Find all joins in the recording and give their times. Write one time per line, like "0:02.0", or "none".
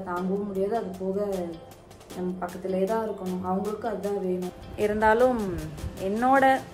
0:04.6